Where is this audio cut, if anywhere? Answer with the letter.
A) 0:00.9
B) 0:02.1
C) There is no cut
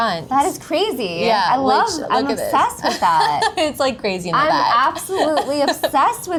C